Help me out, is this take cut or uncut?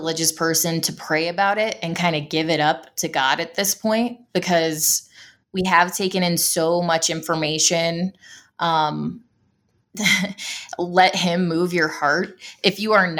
uncut